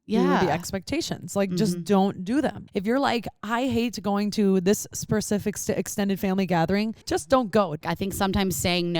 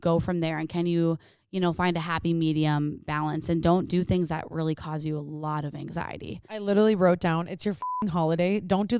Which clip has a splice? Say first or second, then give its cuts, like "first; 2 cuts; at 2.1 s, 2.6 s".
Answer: first; 3 cuts; at 2.6 s, 7.0 s, 7.8 s